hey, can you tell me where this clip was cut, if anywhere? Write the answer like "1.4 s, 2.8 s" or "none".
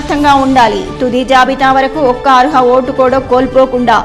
none